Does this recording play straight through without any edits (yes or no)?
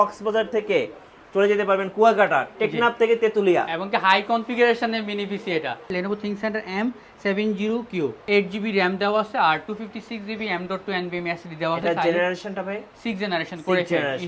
no